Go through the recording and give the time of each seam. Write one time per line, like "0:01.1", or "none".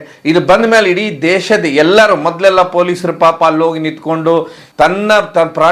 0:04.6